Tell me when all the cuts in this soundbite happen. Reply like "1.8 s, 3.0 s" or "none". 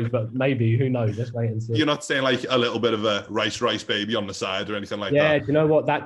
1.7 s